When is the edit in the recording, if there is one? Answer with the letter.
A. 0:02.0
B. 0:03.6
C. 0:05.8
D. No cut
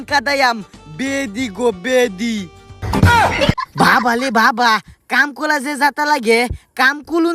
B